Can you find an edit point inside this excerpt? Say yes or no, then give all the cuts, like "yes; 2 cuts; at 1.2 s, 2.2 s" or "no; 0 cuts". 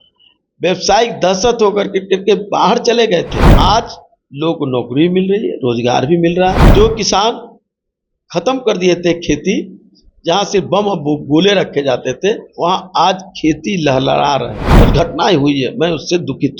yes; 4 cuts; at 3.5 s, 6.6 s, 12.5 s, 14.7 s